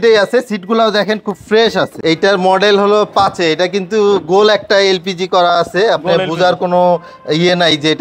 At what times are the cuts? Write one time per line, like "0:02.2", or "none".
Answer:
0:01.9